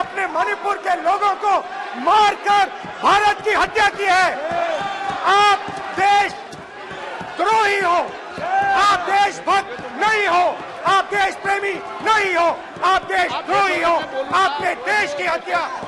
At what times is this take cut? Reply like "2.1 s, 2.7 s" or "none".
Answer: none